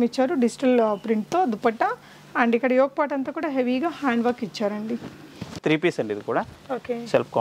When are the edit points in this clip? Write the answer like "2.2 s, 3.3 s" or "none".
5.5 s